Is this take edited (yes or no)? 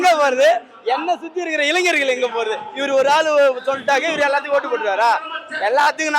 no